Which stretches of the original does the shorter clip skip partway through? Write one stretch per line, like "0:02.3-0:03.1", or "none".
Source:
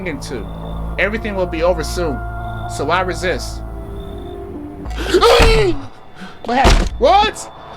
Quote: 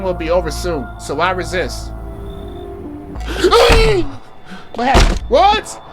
0:02.3-0:02.7